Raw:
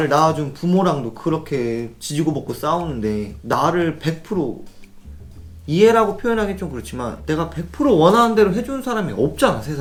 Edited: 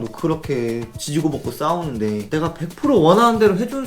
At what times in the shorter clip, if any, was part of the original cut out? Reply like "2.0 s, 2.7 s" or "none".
2.2 s